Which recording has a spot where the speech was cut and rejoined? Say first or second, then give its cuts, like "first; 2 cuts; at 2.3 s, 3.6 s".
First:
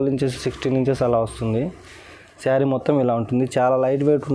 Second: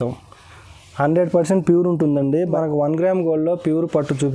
second; 1 cut; at 2.5 s